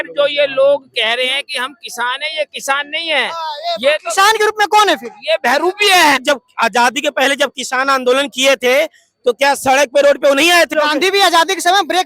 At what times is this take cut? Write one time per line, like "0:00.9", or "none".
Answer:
0:06.2
0:10.7